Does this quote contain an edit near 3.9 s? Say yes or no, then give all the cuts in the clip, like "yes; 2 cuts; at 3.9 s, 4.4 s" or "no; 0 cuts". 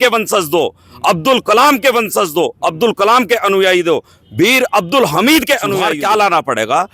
no; 1 cut; at 5.9 s